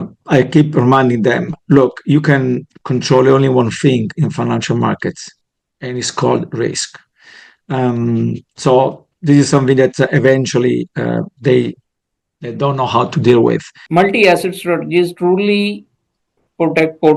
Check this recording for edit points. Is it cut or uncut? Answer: cut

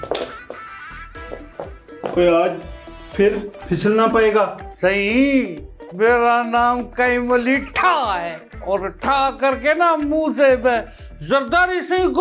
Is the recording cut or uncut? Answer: uncut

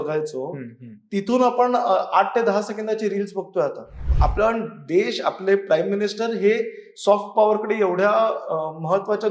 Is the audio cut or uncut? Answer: cut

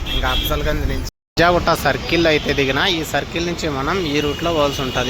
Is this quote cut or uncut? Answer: cut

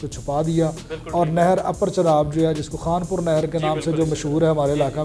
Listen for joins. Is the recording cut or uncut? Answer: uncut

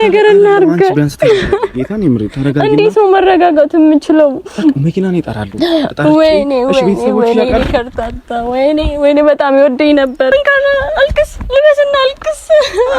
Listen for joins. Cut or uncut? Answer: cut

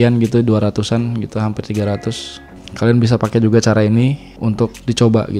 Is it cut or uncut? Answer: uncut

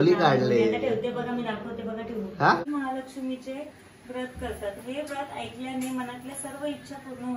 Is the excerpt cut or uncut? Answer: cut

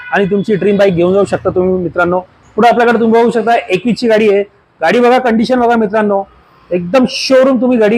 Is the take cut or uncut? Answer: uncut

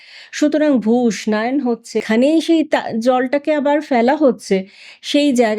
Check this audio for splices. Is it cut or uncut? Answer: cut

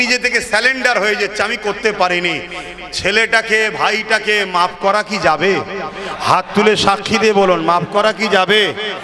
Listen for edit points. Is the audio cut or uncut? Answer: uncut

